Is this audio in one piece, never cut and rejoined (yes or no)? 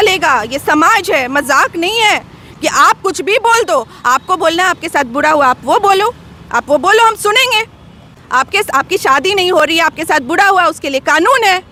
yes